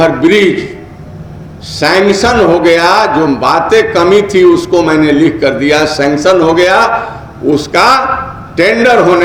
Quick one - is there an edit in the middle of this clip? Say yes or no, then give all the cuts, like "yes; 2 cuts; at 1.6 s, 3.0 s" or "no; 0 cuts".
no; 0 cuts